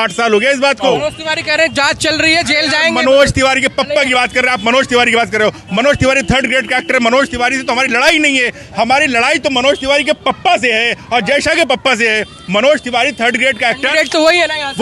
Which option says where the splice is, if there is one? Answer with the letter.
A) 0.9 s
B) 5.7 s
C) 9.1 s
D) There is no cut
A